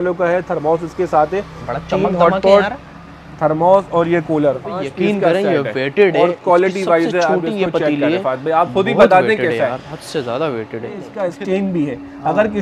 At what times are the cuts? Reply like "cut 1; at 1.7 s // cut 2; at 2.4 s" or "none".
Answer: cut 1; at 4.8 s // cut 2; at 11.1 s